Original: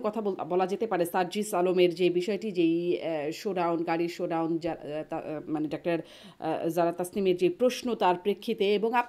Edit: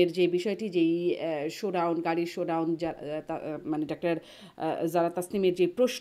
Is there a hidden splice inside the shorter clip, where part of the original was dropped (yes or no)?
no